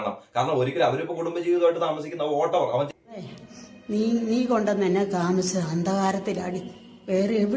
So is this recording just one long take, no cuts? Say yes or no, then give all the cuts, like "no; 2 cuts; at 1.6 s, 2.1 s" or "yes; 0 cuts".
no; 1 cut; at 2.9 s